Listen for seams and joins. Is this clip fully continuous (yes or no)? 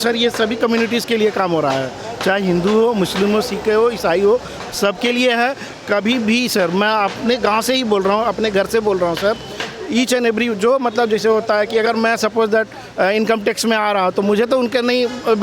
yes